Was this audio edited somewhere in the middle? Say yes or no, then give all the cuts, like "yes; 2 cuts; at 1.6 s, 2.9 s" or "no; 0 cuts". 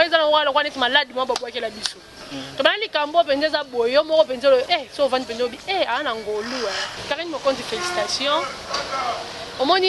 yes; 1 cut; at 6.9 s